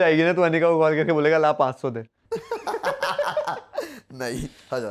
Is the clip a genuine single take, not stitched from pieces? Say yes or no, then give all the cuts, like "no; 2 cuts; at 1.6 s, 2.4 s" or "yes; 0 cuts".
yes; 0 cuts